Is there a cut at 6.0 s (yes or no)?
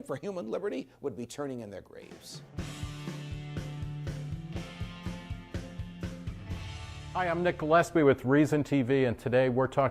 no